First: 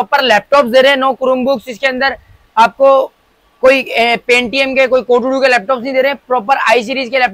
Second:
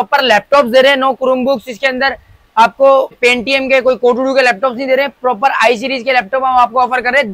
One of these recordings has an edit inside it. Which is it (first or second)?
second